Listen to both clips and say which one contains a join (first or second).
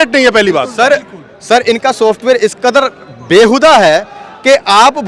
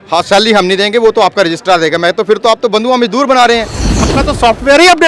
second